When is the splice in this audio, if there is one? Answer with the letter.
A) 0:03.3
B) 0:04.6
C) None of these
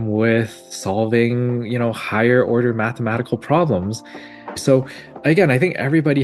B